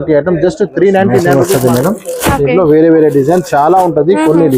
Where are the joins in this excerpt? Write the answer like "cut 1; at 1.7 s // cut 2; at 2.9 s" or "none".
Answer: cut 1; at 1.4 s

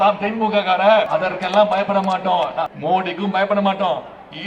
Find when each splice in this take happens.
cut 1; at 1.1 s // cut 2; at 2.7 s

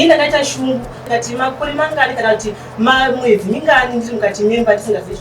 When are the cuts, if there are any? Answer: cut 1; at 1.0 s

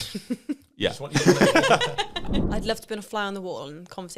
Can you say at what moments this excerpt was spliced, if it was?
cut 1; at 2.4 s

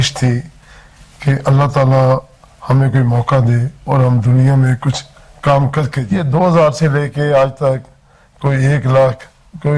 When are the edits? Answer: cut 1; at 6.0 s

